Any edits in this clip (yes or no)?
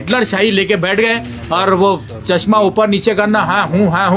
no